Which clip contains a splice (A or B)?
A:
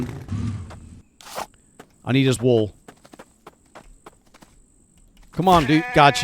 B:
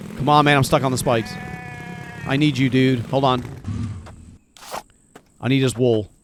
A